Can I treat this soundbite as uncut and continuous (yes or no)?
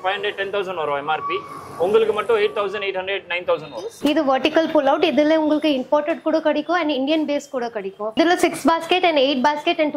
no